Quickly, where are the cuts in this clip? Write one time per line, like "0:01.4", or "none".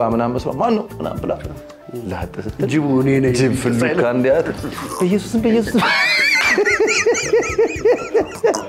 none